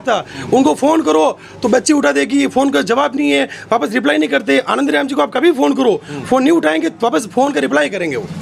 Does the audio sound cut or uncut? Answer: uncut